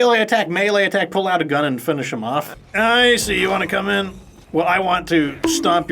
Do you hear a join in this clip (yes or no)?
yes